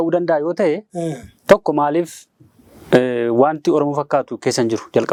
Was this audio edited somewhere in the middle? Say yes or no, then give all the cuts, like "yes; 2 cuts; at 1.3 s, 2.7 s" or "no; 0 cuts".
no; 0 cuts